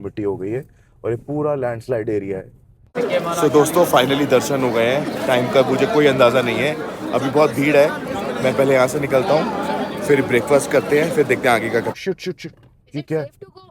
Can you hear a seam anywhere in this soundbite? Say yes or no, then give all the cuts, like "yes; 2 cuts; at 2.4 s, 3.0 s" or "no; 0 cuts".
yes; 2 cuts; at 3.0 s, 11.9 s